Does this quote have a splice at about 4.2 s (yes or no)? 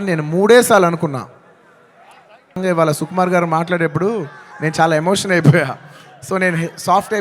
no